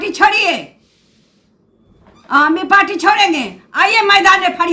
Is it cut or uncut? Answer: uncut